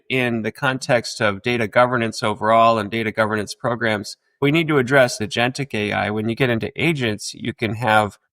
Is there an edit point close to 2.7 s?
no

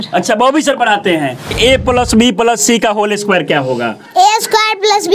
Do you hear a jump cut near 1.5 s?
yes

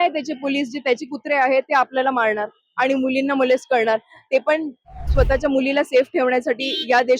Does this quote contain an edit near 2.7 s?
no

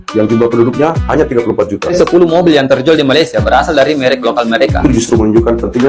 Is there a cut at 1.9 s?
yes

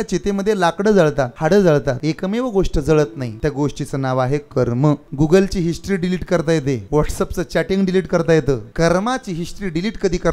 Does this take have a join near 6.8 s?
yes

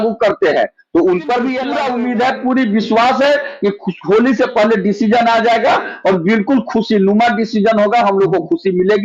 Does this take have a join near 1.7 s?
yes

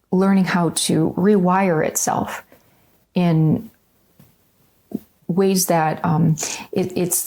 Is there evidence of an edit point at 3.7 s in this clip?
no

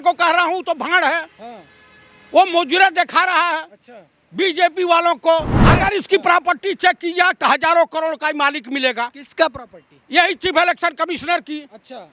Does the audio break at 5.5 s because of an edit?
yes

